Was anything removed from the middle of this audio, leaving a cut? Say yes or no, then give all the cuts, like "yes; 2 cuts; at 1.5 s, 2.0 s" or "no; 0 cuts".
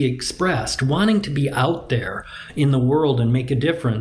no; 0 cuts